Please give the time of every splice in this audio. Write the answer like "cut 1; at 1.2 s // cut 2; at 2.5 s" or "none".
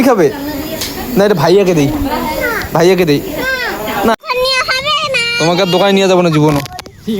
cut 1; at 4.1 s